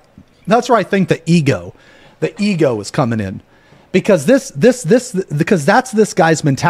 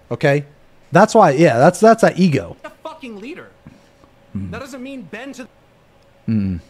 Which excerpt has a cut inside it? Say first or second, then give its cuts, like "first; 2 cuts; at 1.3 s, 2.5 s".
second; 1 cut; at 1.4 s